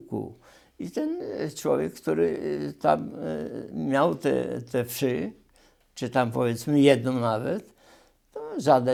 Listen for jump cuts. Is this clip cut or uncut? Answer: uncut